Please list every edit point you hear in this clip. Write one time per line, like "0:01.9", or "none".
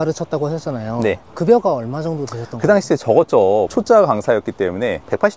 0:03.7